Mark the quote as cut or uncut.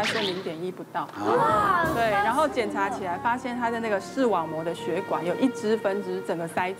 uncut